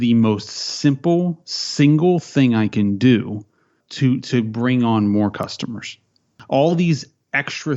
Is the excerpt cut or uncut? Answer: cut